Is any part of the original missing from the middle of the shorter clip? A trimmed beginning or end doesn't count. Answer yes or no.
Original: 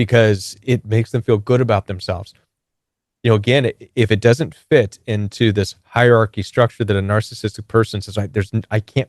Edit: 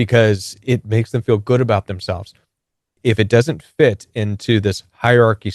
yes